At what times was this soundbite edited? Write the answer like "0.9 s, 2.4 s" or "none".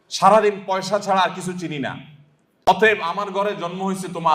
2.7 s